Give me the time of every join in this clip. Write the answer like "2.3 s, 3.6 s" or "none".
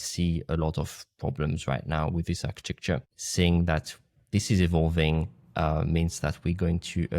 3.2 s

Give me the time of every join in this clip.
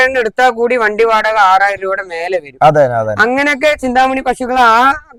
none

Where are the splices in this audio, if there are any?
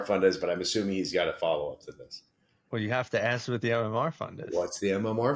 none

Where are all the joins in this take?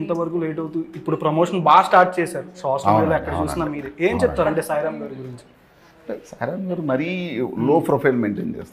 none

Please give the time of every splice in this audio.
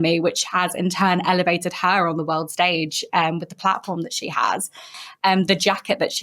5.0 s

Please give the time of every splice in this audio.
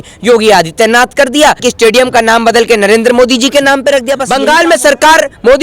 1.6 s, 4.2 s

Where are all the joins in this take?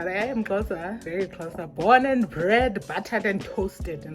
1.0 s

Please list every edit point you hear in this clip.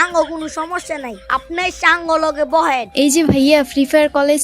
2.9 s

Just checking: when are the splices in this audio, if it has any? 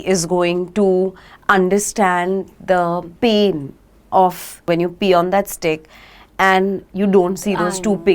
3.1 s, 4.7 s

